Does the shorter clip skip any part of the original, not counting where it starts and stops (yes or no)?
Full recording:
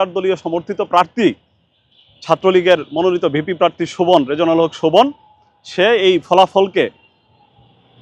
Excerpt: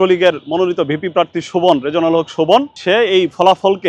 yes